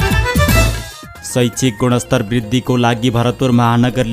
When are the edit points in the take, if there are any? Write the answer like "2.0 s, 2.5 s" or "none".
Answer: 1.2 s

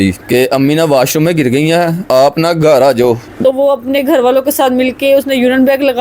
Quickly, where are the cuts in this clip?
3.4 s

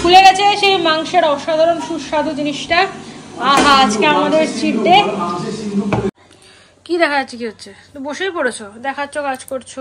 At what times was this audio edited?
6.1 s

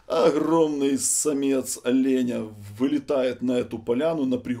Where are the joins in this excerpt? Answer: none

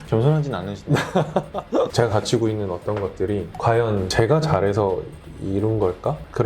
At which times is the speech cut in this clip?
1.9 s

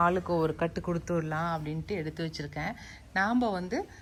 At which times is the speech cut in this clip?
none

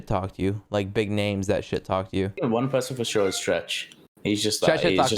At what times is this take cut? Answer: 2.4 s

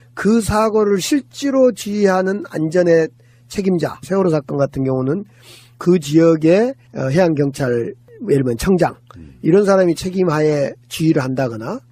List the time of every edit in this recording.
4.0 s

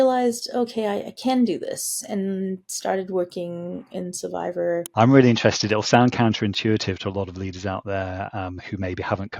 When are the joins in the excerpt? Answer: 4.9 s

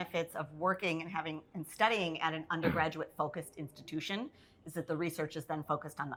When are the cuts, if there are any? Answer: none

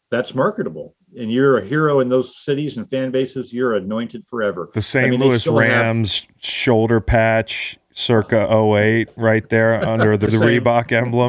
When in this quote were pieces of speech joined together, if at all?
10.3 s

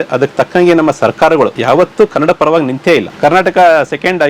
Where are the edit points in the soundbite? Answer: 1.6 s, 3.1 s

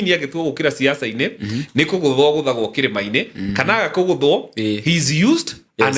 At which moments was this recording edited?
none

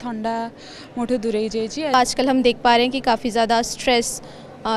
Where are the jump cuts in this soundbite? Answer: 1.9 s

